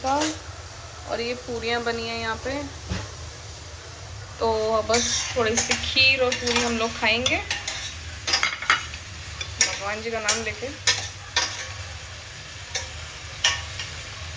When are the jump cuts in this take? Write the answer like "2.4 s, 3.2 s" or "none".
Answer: none